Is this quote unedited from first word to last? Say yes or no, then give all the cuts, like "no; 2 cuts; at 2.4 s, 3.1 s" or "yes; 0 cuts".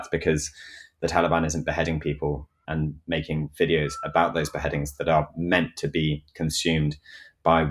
no; 1 cut; at 2.6 s